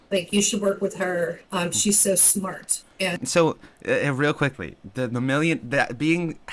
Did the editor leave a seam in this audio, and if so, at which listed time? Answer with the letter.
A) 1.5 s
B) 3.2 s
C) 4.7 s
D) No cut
B